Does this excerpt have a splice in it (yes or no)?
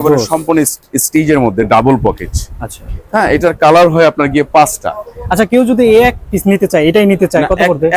no